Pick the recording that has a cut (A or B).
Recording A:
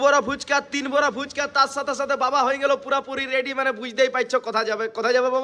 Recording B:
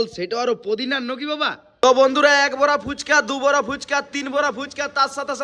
B